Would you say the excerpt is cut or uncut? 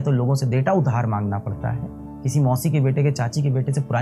cut